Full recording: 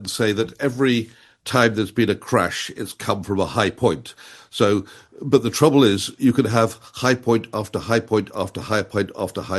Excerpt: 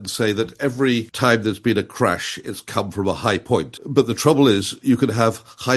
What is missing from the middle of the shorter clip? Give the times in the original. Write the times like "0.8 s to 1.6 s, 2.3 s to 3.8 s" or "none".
1.1 s to 1.4 s, 4.1 s to 5.1 s